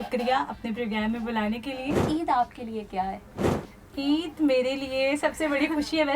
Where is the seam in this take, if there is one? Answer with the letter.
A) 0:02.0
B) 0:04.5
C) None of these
A